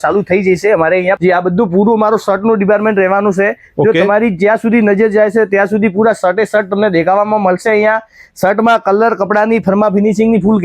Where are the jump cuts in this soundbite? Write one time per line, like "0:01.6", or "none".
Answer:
0:01.2

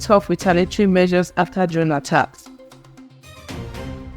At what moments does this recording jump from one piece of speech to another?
0:02.9

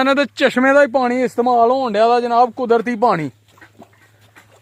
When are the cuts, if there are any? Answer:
none

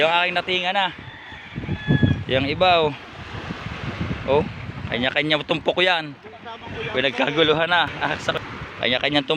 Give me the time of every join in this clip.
0:08.4

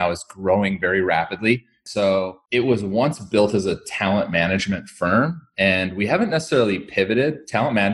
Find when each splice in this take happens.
0:02.0

